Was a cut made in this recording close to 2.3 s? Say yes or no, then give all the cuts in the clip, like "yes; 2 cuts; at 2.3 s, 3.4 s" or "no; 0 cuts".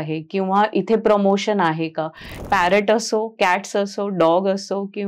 yes; 1 cut; at 2.3 s